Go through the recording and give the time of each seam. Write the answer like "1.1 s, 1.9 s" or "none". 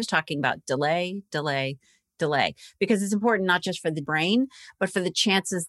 4.1 s